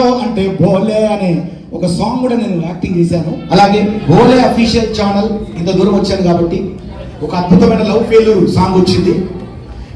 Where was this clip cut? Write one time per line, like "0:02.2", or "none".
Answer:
0:03.4